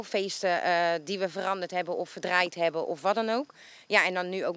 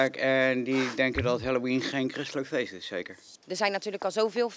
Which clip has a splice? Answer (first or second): second